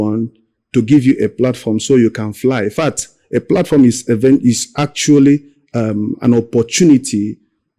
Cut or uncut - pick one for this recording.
uncut